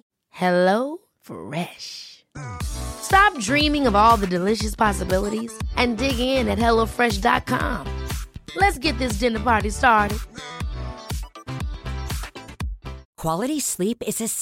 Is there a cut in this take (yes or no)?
yes